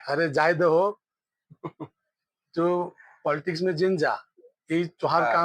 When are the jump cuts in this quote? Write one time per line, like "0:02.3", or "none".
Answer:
none